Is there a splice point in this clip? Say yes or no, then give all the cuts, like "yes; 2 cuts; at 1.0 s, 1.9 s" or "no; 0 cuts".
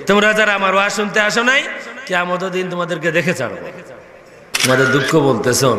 yes; 1 cut; at 4.5 s